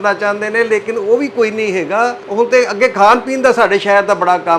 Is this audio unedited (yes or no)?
no